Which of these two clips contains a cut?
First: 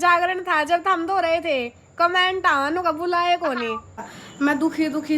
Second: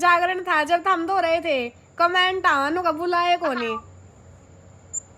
first; 1 cut; at 4.2 s

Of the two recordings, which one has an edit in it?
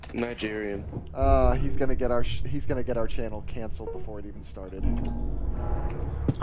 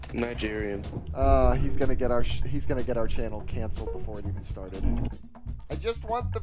second; 1 cut; at 5.1 s

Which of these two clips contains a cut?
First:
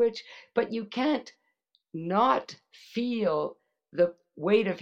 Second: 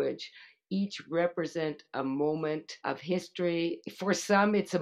second; 2 cuts; at 2.7 s, 3.8 s

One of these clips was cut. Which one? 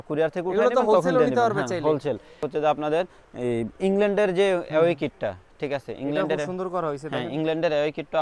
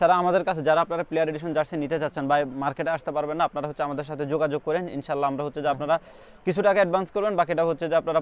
first; 1 cut; at 2.5 s

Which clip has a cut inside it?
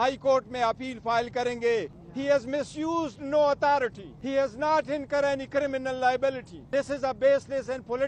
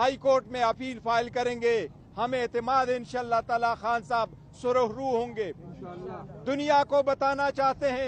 first; 3 cuts; at 2.0 s, 4.1 s, 6.5 s

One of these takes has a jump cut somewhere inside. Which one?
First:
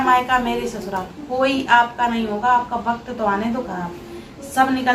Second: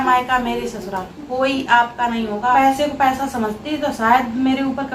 second; 1 cut; at 2.6 s

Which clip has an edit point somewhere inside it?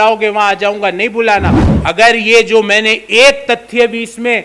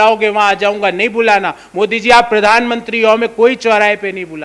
first; 1 cut; at 1.6 s

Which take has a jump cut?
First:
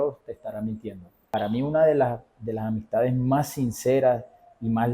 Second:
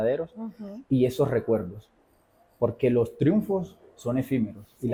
first; 1 cut; at 1.3 s

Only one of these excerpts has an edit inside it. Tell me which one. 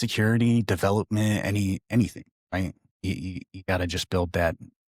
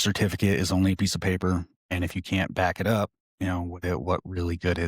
second; 2 cuts; at 1.8 s, 3.2 s

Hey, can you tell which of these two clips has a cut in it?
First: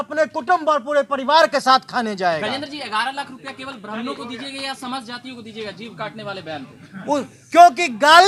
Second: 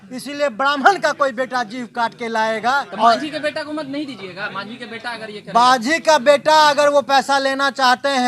second; 1 cut; at 2.9 s

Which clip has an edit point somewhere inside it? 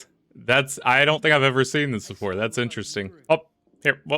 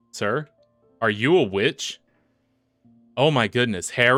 first; 1 cut; at 3.1 s

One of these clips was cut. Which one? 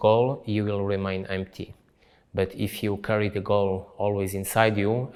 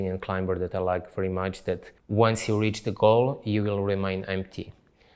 second; 1 cut; at 1.9 s

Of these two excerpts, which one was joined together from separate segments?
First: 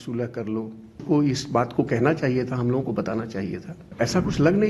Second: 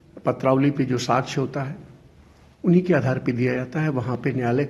first; 2 cuts; at 1.0 s, 3.9 s

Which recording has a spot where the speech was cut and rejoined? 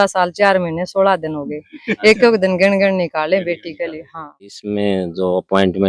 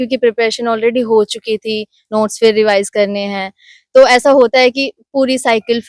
first; 1 cut; at 4.6 s

